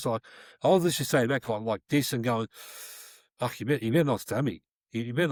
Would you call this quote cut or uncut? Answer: uncut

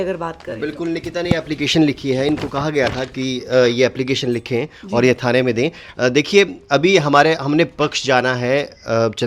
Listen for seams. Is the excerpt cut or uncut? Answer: uncut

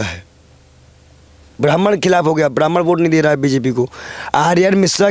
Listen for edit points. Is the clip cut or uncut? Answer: uncut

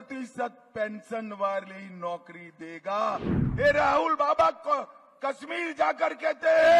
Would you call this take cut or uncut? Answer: cut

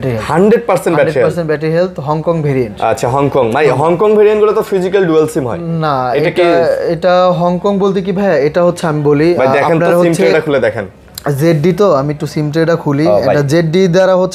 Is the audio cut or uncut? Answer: uncut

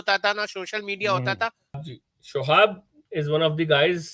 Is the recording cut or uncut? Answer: cut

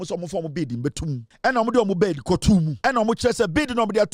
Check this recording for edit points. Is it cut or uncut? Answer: cut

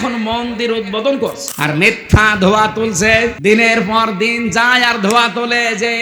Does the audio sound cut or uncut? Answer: cut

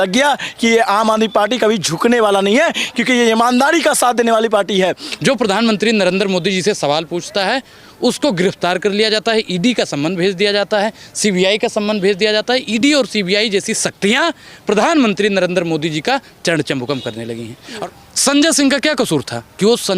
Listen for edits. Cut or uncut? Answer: cut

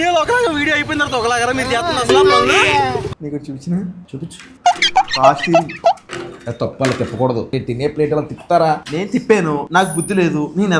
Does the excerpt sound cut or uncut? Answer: cut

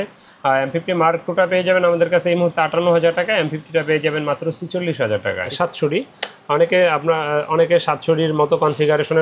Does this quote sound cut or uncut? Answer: cut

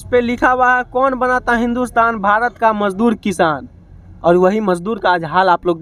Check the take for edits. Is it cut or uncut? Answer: uncut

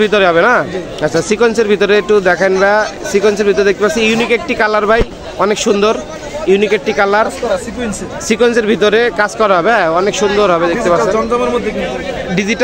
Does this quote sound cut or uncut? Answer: uncut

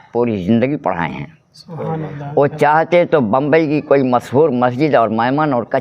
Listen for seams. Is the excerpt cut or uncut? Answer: uncut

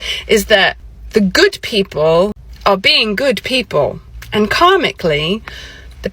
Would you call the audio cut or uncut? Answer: cut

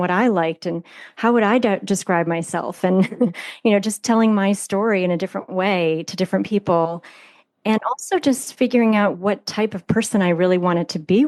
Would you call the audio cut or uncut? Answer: uncut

